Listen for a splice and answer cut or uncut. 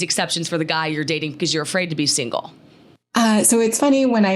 cut